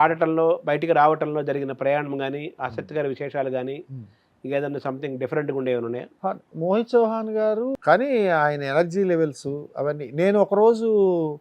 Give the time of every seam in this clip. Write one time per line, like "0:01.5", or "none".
0:06.1
0:07.7